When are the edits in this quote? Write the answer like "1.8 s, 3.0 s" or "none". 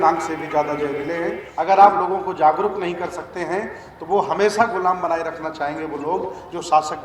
1.4 s